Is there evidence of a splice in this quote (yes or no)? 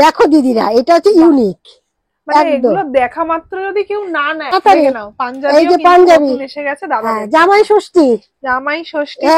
yes